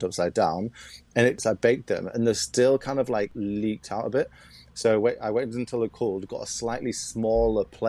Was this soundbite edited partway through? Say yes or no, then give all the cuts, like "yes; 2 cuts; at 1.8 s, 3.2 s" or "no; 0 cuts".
yes; 2 cuts; at 1.4 s, 3.3 s